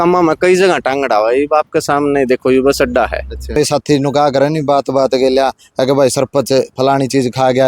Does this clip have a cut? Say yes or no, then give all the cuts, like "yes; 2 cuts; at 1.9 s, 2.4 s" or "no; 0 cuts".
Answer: yes; 1 cut; at 3.6 s